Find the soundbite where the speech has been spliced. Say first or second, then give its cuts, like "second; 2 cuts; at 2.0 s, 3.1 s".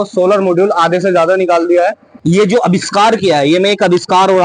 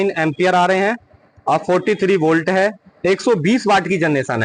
first; 1 cut; at 2.1 s